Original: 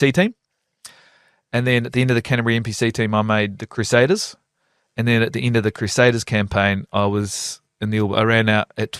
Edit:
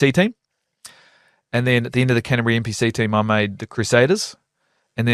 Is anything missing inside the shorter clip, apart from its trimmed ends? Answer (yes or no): no